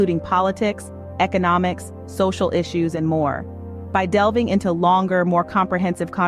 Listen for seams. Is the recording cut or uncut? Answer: uncut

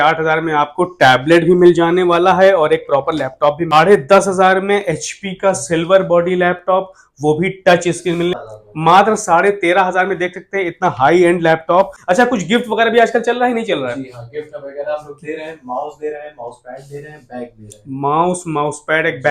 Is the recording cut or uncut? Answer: cut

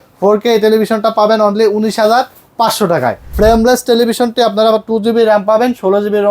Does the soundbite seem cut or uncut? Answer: cut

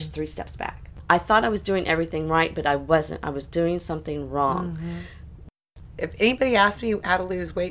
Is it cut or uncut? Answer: cut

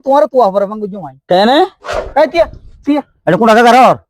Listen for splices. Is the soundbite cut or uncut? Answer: cut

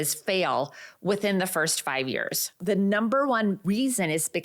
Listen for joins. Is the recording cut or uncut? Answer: cut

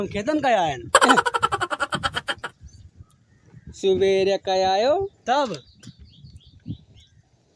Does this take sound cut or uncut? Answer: uncut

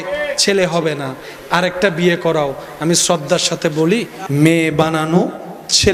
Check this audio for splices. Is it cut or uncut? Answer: uncut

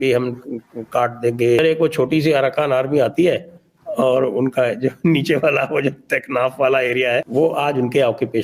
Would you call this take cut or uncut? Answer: cut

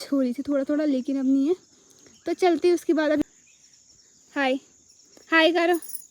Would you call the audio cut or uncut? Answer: cut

